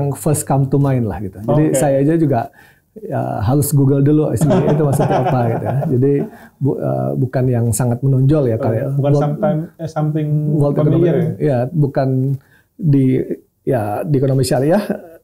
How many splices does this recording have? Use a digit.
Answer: 0